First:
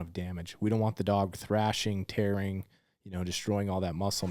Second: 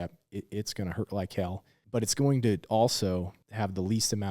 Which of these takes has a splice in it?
second; 2 cuts; at 1.7 s, 3.4 s

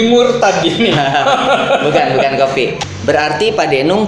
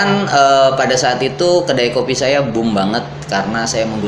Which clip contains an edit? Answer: first; 1 cut; at 2.8 s

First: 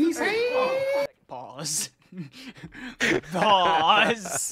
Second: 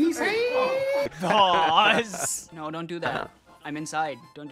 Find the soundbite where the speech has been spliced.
second; 2 cuts; at 1.2 s, 2.4 s

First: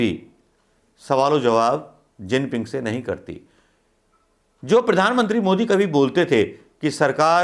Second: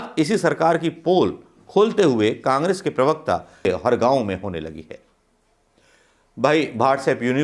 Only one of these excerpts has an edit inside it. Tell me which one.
second; 1 cut; at 3.7 s

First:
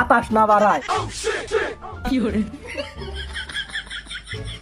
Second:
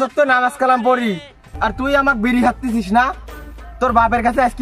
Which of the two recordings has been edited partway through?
first; 1 cut; at 1.4 s

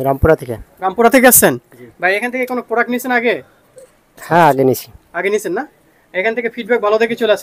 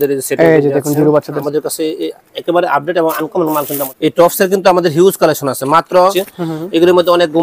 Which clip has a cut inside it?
second; 3 cuts; at 1.4 s, 3.9 s, 6.1 s

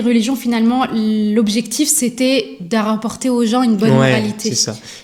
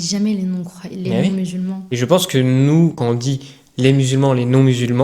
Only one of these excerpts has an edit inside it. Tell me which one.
second; 2 cuts; at 1.9 s, 3.0 s

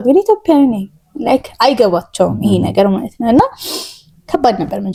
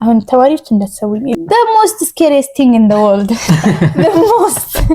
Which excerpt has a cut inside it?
second; 1 cut; at 1.3 s

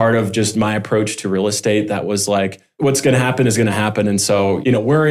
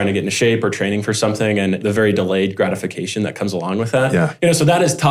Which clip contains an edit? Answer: first; 1 cut; at 2.6 s

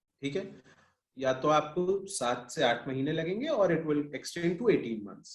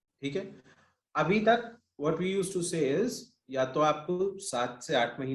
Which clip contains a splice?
first; 1 cut; at 1.0 s

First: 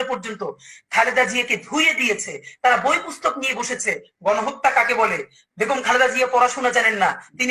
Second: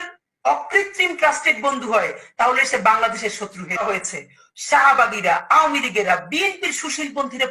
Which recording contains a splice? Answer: second; 1 cut; at 3.8 s

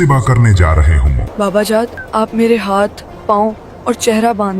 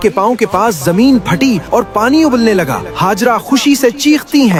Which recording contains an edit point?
first; 2 cuts; at 1.3 s, 2.0 s

